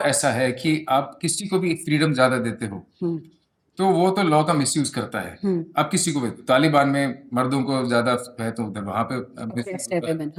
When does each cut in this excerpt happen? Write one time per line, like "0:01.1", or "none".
none